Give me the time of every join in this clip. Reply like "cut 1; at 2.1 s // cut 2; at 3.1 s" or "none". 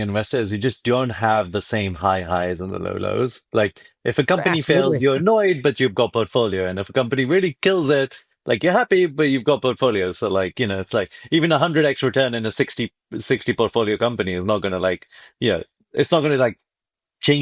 none